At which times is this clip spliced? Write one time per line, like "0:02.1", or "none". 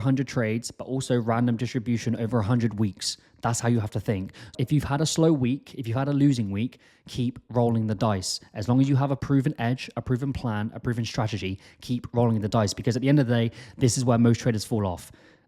0:04.6
0:09.2

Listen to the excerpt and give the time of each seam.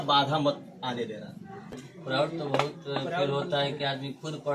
0:01.8

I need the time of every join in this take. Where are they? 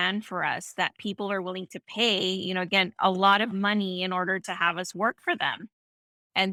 none

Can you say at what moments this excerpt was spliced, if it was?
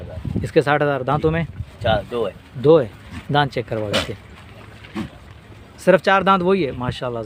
none

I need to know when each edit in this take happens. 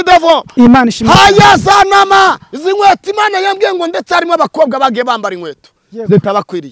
0:02.5

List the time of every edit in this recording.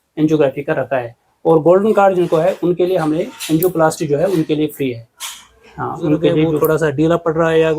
0:06.6

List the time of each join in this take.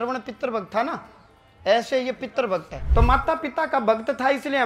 0:02.8

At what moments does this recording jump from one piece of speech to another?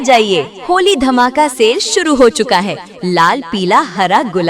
0:02.8

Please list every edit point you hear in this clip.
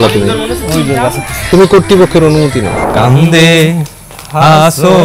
0:02.7

